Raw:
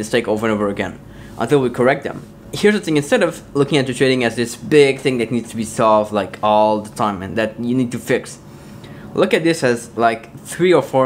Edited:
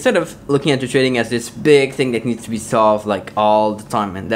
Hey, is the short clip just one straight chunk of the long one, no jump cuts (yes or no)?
yes